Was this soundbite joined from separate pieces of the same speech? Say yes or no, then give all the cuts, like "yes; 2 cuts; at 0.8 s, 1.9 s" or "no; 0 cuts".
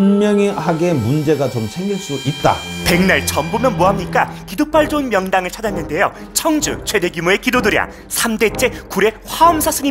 yes; 1 cut; at 2.8 s